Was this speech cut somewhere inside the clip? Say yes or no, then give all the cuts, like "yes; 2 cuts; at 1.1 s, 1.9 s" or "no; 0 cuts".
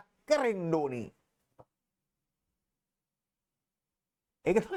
no; 0 cuts